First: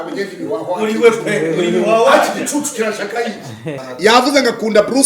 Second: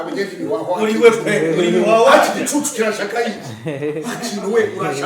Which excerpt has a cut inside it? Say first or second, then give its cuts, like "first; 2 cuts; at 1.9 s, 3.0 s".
first; 1 cut; at 3.8 s